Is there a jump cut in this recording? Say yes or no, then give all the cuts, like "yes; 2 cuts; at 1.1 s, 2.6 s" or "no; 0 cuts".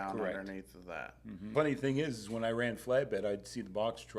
yes; 1 cut; at 1.5 s